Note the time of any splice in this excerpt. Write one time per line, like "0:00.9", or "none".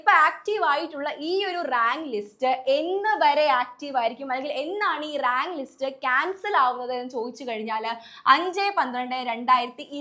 none